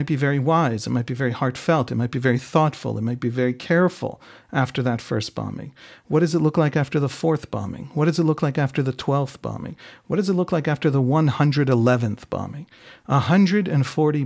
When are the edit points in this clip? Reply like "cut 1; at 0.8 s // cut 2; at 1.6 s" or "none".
none